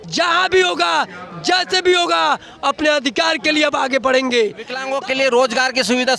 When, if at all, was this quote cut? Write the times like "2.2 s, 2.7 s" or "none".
4.8 s